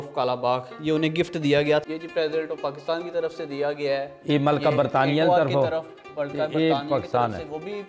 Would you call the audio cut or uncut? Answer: cut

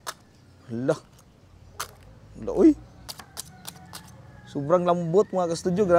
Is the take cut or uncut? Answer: cut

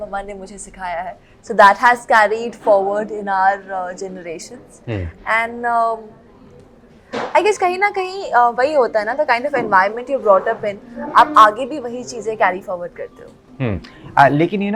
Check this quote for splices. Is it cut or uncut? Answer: uncut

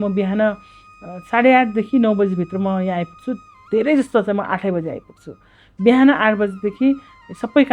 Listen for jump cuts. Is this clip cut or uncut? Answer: uncut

